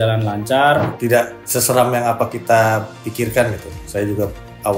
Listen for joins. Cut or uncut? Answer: cut